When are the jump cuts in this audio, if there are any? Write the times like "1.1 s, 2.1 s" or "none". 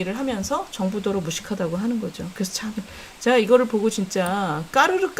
none